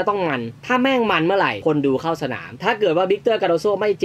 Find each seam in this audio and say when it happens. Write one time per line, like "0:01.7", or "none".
0:02.5